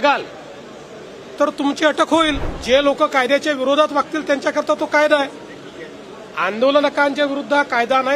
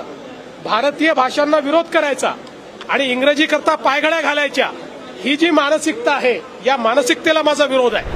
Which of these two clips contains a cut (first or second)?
first